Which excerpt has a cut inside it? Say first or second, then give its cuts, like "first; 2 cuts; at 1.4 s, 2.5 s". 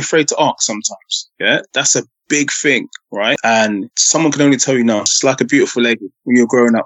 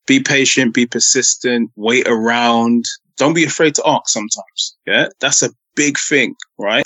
first; 1 cut; at 5.1 s